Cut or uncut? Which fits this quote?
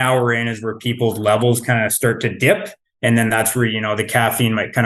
uncut